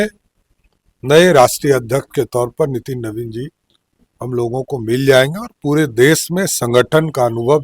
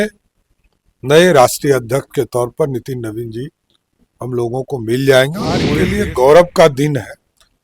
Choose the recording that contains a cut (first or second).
second